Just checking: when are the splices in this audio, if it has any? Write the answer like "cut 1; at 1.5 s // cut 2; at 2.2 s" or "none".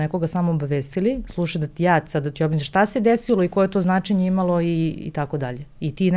none